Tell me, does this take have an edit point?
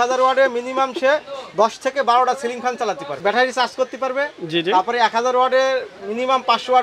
yes; 1 cut; at 3.1 s

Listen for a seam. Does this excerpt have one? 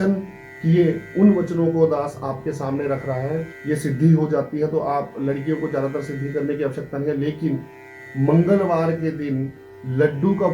yes; 2 cuts; at 3.5 s, 7.9 s

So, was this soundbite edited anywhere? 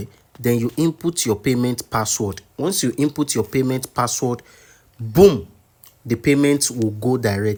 no; 0 cuts

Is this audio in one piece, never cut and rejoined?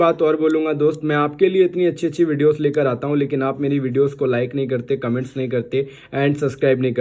yes; 0 cuts

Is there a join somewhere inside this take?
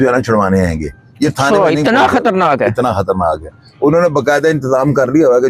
no; 0 cuts

